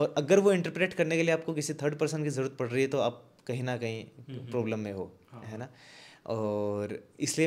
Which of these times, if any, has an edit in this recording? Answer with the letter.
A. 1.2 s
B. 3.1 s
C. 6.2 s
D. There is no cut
D